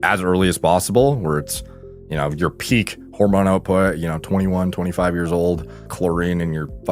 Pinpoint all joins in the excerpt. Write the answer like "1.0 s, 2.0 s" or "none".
5.9 s